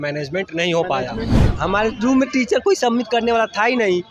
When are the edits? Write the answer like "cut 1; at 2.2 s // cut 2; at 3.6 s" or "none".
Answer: cut 1; at 1.4 s

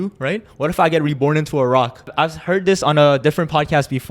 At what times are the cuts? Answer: cut 1; at 2.1 s

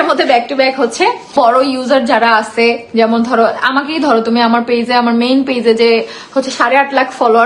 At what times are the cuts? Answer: cut 1; at 1.3 s

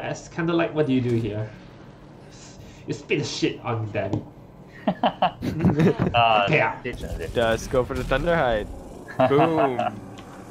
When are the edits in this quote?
cut 1; at 7.1 s

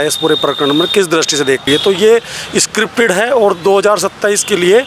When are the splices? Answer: cut 1; at 1.6 s

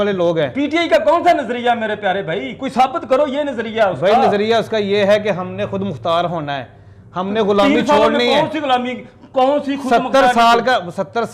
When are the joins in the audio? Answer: none

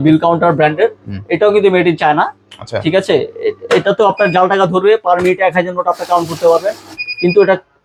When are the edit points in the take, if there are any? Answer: none

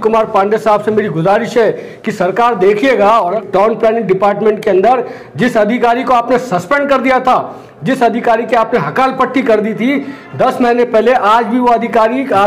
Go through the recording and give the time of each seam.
cut 1; at 3.4 s

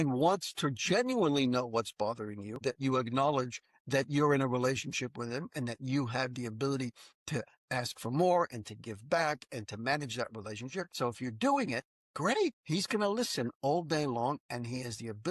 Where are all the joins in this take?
cut 1; at 2.6 s // cut 2; at 10.9 s // cut 3; at 12.4 s

